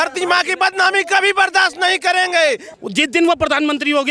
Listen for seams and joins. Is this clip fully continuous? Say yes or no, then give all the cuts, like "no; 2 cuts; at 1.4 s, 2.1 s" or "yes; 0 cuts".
no; 1 cut; at 2.7 s